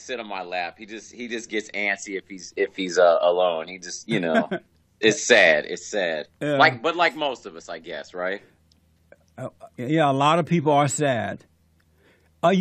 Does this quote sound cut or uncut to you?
cut